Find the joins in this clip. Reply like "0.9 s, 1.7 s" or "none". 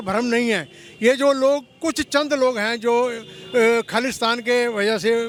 none